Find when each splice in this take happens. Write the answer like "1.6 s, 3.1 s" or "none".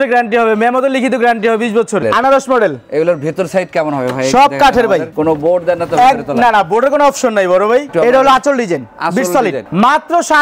2.0 s, 5.1 s, 7.9 s, 9.6 s